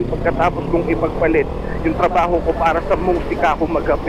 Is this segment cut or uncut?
uncut